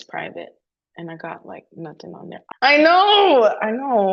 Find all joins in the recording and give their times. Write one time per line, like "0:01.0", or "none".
0:02.6